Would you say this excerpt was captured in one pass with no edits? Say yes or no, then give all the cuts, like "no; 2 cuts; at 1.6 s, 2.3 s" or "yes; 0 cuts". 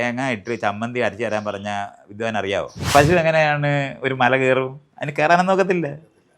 no; 1 cut; at 2.8 s